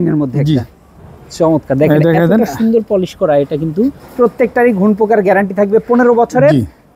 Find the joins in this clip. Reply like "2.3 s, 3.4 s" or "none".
4.0 s